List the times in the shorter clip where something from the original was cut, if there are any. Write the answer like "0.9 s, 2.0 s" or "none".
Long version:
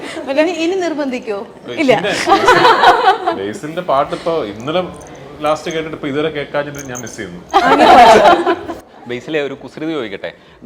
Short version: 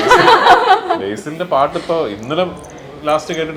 none